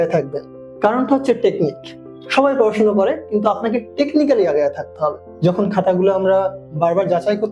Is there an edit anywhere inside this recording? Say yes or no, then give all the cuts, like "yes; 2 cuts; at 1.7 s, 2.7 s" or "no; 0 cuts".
yes; 1 cut; at 5.3 s